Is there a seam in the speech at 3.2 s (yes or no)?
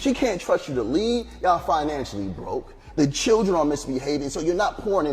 yes